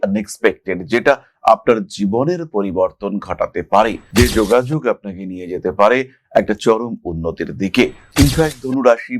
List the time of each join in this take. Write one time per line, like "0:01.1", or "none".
0:08.1